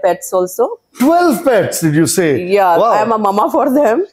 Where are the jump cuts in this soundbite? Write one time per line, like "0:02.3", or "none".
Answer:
none